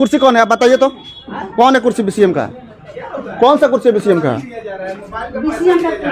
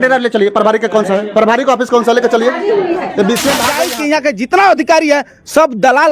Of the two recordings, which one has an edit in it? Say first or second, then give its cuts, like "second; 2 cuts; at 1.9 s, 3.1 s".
second; 1 cut; at 3.7 s